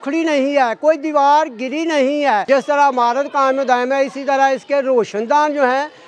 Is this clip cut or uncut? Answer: cut